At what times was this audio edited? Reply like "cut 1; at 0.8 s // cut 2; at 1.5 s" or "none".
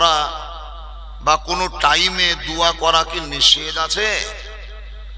none